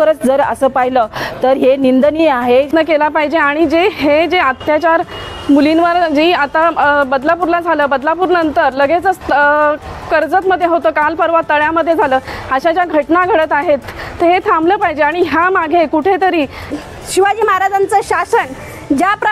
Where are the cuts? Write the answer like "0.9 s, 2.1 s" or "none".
2.7 s, 16.7 s

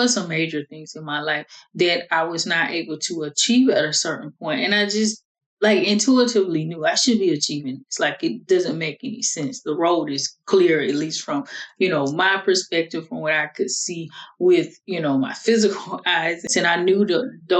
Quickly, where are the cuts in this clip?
16.5 s

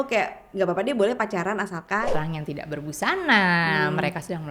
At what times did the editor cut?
2.1 s

